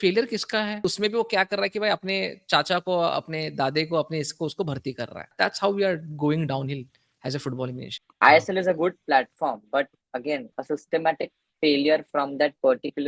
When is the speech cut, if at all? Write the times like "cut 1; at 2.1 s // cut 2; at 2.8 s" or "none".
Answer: cut 1; at 0.8 s // cut 2; at 5.3 s // cut 3; at 8.0 s // cut 4; at 10.5 s